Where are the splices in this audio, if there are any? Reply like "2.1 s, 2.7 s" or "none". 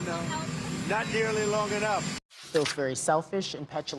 2.4 s